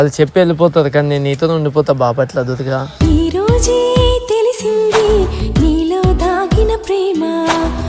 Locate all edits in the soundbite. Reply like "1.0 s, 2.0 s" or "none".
none